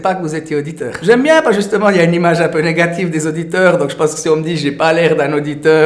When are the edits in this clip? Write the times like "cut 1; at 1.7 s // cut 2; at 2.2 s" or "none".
cut 1; at 1.0 s